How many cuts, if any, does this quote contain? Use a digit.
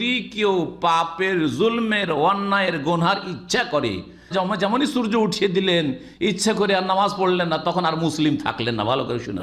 1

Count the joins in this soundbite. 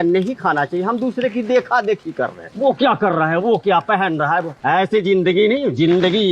0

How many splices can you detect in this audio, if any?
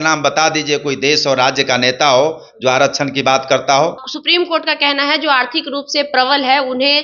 1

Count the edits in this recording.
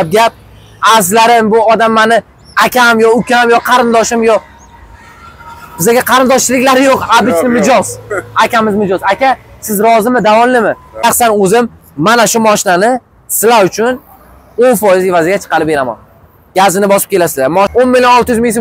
2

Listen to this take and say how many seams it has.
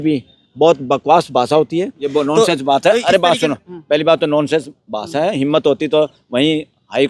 1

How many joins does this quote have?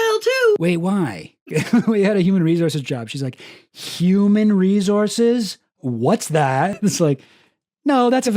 1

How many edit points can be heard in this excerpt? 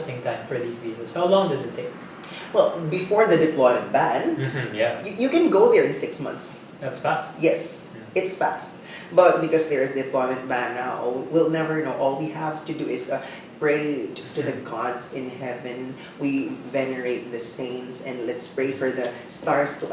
0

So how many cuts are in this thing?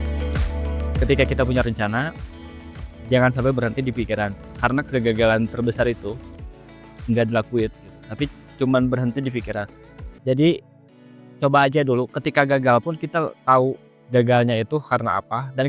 2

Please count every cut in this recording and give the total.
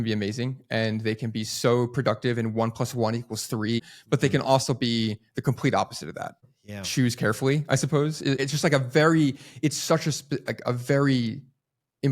3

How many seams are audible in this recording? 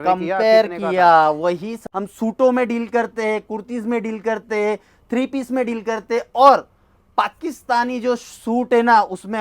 1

